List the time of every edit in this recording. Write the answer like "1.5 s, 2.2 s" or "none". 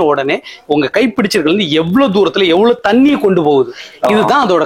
none